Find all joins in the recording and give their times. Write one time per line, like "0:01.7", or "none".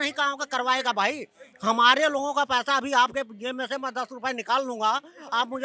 none